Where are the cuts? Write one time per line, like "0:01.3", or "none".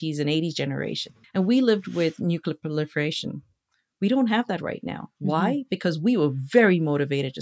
0:01.0